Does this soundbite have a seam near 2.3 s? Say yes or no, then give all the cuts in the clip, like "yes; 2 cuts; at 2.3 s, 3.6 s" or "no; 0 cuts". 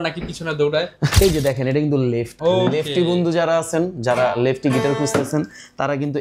yes; 2 cuts; at 1.0 s, 2.3 s